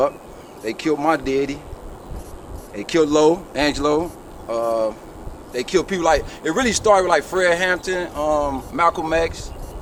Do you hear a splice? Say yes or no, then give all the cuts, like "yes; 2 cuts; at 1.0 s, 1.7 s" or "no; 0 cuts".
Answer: no; 0 cuts